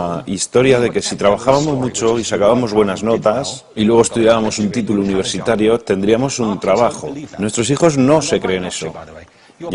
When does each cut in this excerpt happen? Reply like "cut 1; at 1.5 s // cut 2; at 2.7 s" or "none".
cut 1; at 8.0 s